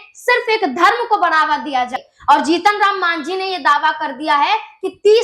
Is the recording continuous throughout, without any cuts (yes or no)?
no